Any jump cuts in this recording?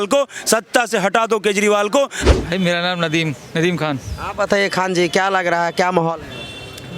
yes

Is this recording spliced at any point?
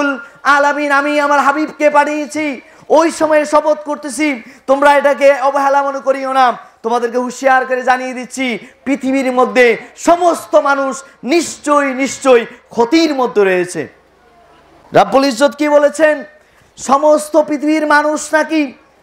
no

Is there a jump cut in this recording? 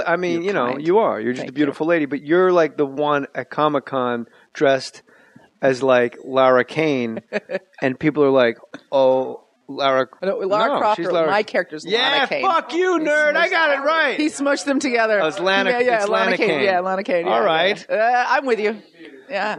no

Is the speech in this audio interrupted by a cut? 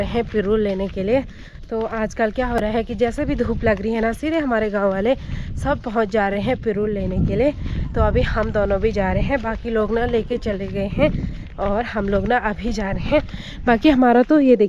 no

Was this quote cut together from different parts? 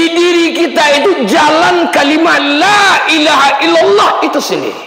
no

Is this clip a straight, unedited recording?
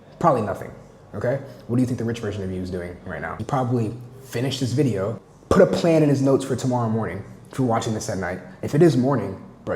no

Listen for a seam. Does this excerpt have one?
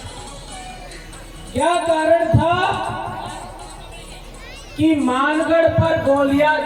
no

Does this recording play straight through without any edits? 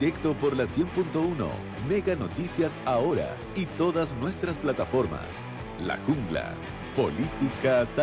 yes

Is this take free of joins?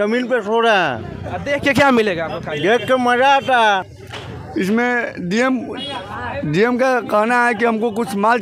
yes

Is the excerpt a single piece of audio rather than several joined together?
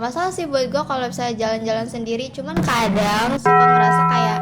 no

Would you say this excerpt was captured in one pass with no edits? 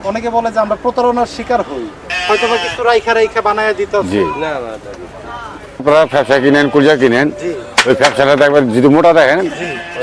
no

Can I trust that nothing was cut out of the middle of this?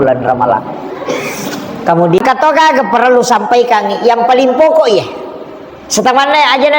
no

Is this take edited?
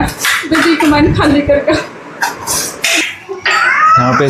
yes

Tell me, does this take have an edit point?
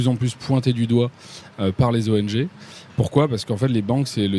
no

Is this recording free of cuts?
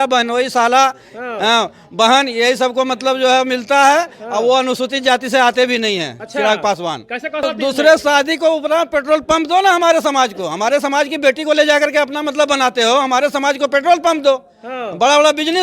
no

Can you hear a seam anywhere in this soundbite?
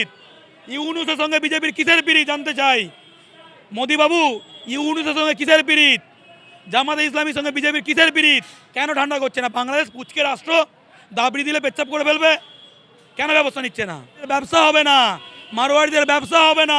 yes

